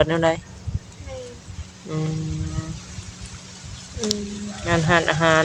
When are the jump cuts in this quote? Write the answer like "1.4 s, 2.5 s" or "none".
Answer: none